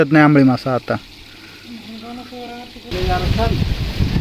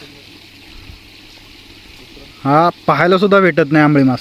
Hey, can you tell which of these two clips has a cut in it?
first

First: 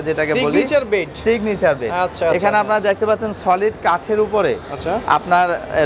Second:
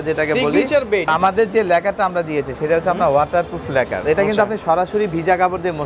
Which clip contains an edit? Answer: second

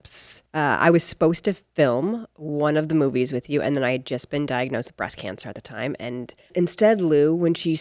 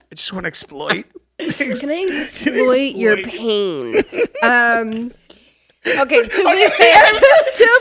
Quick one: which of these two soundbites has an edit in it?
first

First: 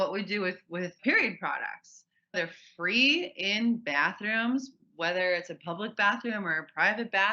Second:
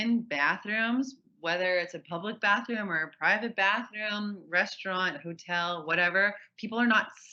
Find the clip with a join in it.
first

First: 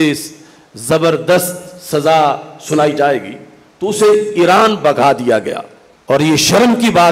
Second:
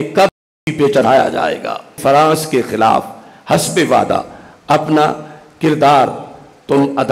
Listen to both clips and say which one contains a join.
second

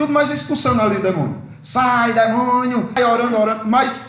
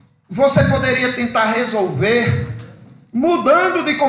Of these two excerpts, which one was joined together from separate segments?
first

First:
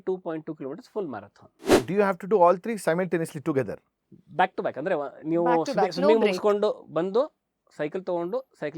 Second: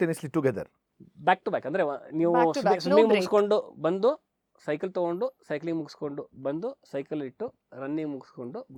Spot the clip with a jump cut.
first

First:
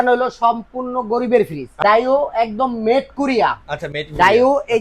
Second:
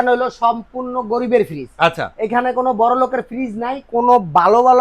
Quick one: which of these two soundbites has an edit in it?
first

